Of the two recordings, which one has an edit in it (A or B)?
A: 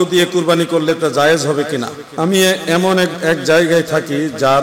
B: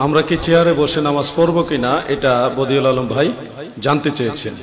A